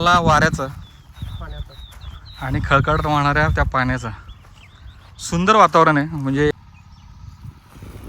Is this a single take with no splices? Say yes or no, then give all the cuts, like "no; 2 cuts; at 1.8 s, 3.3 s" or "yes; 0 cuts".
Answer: no; 1 cut; at 6.5 s